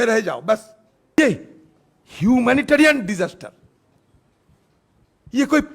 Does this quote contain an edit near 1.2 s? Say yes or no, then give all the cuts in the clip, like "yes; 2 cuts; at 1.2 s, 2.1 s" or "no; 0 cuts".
yes; 1 cut; at 1.2 s